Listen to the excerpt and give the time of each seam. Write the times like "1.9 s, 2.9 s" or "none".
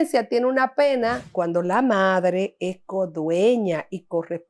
1.3 s